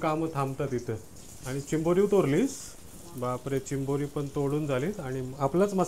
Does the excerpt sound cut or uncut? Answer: uncut